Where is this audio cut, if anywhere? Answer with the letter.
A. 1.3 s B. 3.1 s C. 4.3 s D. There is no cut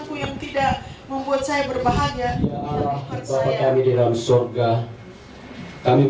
B